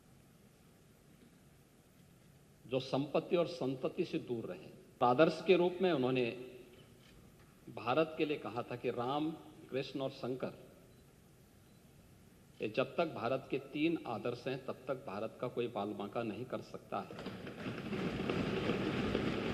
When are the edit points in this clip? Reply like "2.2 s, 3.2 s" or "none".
5.0 s